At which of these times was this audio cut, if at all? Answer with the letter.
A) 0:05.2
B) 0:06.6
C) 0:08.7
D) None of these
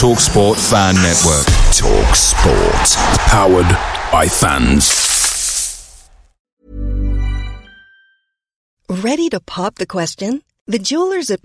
B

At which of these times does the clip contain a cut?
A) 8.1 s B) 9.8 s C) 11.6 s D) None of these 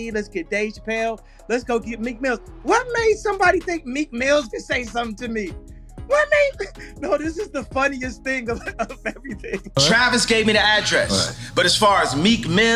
B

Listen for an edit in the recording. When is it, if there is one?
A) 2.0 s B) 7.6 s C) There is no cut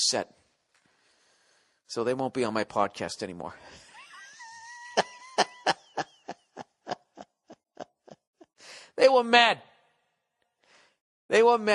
A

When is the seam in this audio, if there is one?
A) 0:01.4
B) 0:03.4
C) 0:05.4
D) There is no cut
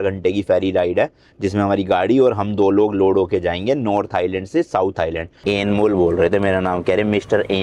C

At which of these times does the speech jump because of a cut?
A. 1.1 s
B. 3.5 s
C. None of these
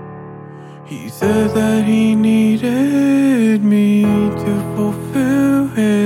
A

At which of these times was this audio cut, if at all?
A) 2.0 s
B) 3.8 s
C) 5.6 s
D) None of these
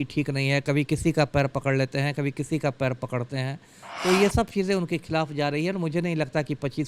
D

